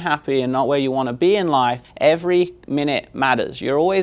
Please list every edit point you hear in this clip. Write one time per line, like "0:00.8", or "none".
0:01.9